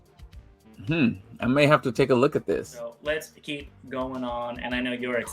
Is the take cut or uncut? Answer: cut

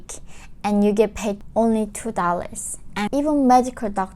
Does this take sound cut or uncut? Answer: cut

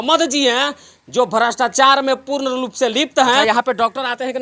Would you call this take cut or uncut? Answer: cut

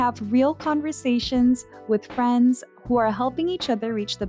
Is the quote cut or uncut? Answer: uncut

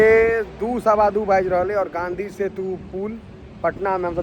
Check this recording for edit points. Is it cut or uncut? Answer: uncut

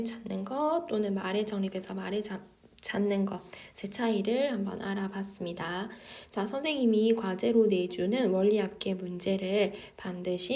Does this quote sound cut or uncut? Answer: uncut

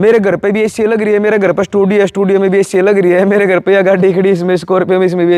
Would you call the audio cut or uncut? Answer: uncut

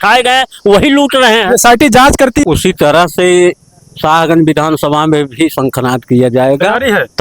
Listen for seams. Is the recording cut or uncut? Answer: cut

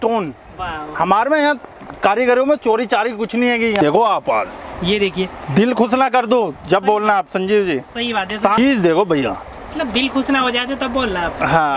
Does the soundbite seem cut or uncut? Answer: cut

